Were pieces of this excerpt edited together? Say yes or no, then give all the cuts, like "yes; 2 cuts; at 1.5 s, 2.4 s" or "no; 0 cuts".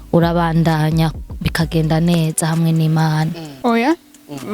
yes; 1 cut; at 3.4 s